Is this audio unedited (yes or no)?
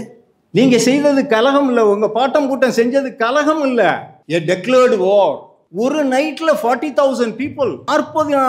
yes